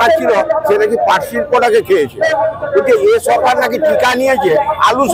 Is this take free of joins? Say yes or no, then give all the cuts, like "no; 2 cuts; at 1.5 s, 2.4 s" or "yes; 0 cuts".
yes; 0 cuts